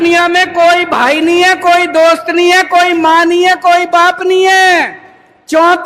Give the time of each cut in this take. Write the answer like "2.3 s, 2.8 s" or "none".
none